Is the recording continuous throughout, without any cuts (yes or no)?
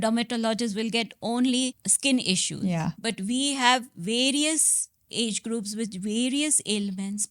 no